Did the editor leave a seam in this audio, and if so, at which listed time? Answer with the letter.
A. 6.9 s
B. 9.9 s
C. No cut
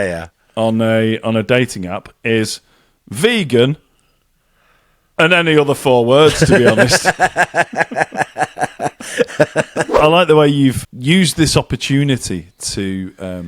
B